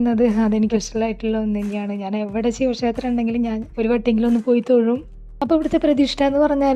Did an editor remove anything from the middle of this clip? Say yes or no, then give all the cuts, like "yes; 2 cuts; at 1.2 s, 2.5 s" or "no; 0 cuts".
no; 0 cuts